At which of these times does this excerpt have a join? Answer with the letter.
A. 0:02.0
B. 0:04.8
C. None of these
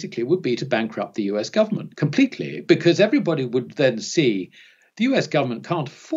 C